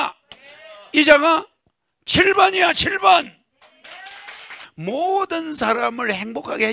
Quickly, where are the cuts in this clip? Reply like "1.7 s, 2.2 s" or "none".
4.6 s

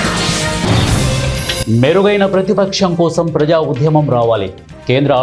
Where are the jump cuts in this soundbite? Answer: 1.2 s

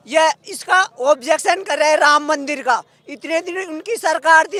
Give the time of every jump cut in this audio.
none

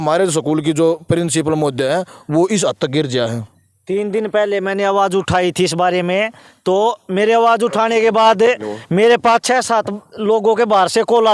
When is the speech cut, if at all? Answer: none

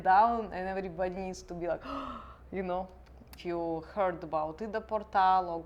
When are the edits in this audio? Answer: 3.2 s

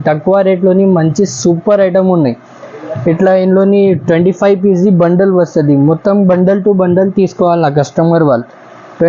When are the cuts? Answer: none

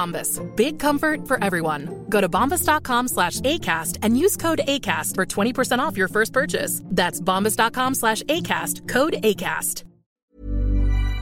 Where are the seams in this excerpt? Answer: 10.1 s

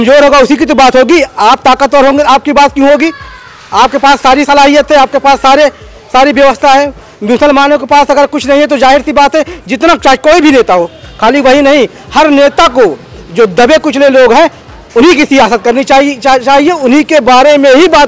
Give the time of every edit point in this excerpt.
none

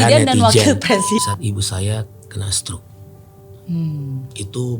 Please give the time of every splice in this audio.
1.2 s

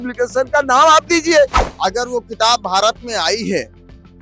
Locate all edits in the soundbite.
1.6 s

